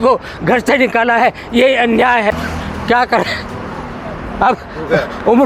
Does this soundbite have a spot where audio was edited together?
yes; 1 cut; at 2.3 s

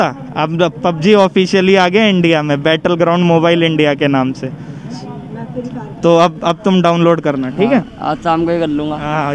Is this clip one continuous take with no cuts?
yes; 0 cuts

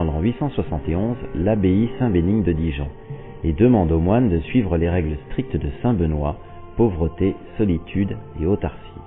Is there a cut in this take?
yes; 1 cut; at 6.8 s

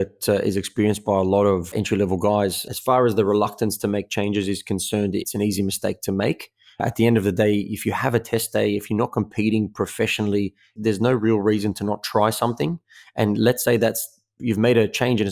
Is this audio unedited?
no; 1 cut; at 2.7 s

